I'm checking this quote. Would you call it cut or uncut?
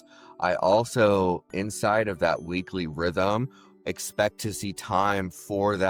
uncut